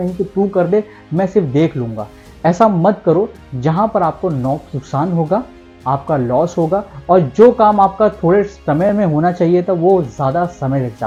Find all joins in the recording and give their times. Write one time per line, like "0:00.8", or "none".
none